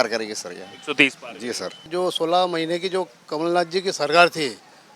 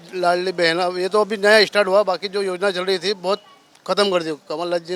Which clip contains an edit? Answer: first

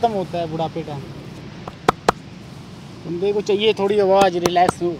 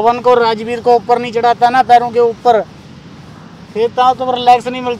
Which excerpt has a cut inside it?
first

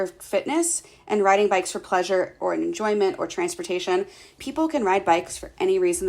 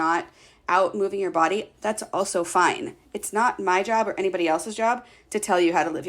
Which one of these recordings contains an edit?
first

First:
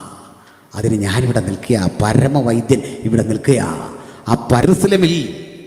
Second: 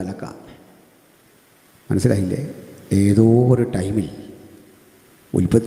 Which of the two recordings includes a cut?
first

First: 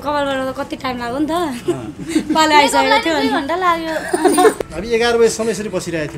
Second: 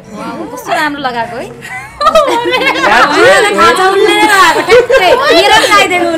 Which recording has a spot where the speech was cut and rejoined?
first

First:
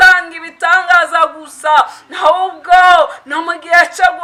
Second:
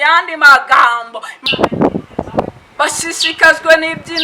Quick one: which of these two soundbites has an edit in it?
second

